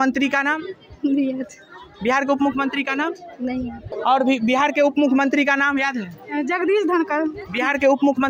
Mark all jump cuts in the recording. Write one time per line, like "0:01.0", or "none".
0:04.0